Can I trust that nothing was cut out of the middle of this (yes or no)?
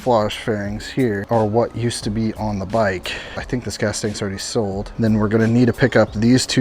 no